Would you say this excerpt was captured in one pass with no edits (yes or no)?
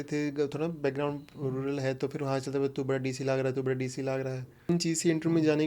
no